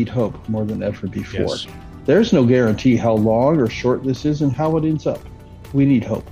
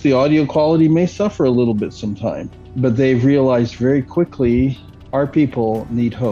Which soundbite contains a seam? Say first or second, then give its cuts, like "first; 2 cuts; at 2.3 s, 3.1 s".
first; 1 cut; at 4.5 s